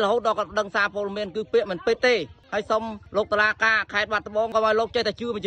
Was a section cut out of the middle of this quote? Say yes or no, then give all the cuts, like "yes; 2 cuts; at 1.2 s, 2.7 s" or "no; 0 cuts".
yes; 1 cut; at 4.5 s